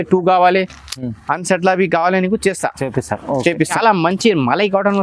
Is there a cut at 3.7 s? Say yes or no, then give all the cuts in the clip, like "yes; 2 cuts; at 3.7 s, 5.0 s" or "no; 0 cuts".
yes; 1 cut; at 3.7 s